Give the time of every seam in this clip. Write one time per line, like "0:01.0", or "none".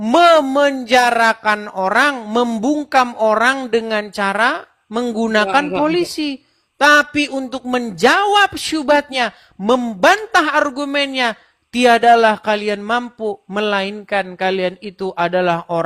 none